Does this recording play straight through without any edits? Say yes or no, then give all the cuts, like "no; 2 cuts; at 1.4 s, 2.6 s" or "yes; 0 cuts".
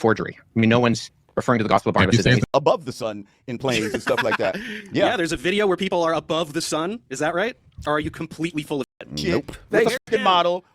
no; 1 cut; at 2.5 s